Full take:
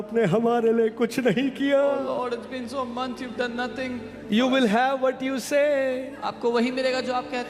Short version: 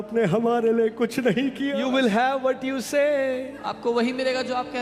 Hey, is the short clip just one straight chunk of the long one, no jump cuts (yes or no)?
no